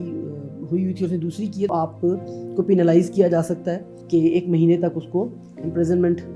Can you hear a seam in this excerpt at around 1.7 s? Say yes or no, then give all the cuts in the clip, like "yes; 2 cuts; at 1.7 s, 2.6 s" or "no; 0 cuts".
yes; 2 cuts; at 1.7 s, 3.9 s